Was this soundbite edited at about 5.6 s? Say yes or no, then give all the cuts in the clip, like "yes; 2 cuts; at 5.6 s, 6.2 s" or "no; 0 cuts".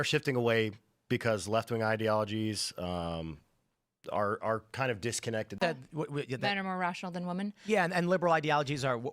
yes; 1 cut; at 5.6 s